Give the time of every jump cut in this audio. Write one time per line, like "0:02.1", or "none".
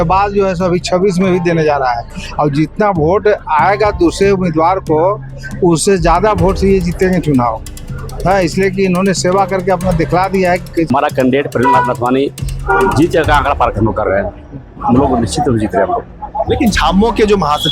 0:10.9

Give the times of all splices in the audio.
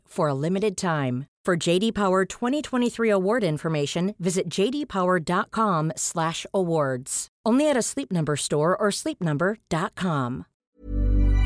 0:10.6

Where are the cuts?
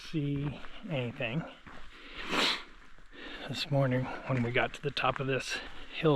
none

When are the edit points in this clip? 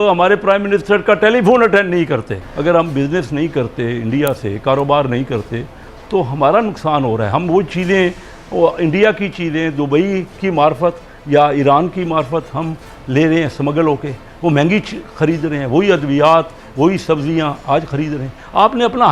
0:02.5

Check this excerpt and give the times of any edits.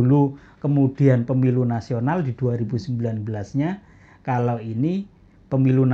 none

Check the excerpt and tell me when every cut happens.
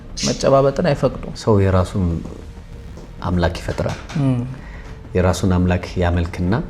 0:01.3

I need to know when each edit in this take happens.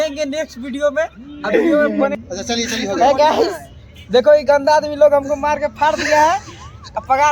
0:02.2

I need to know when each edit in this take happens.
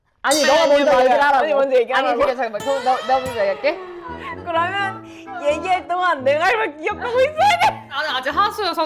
0:03.9
0:08.0

